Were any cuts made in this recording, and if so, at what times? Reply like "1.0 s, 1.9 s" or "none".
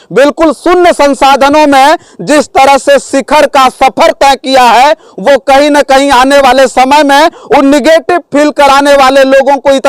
none